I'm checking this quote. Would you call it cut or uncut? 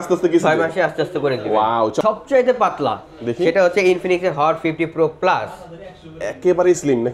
cut